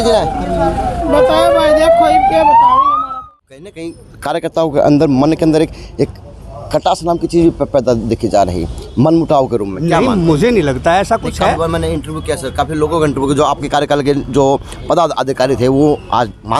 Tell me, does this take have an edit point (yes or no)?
yes